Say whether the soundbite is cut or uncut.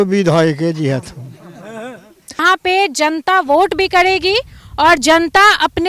cut